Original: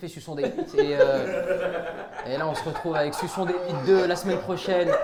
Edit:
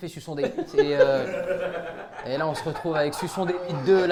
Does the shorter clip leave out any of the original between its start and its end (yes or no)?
no